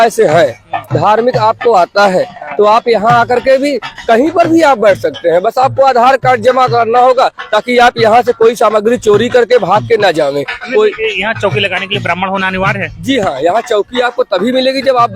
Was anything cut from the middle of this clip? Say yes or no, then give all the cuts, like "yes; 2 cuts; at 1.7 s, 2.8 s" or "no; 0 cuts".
no; 0 cuts